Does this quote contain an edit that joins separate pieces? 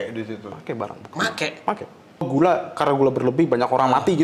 yes; 1 cut; at 2.3 s

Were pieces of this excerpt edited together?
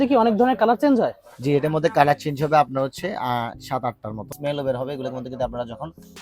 yes; 1 cut; at 4.3 s

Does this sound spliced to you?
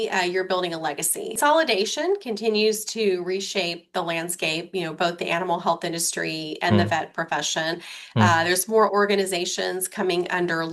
yes; 1 cut; at 1.4 s

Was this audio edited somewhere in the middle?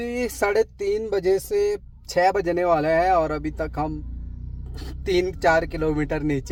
no; 0 cuts

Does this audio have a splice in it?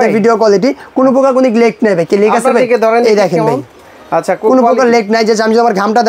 no; 0 cuts

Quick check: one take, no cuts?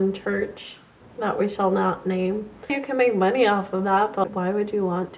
no; 1 cut; at 2.8 s

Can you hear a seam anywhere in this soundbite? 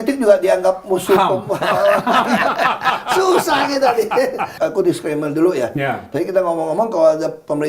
yes; 1 cut; at 4.5 s

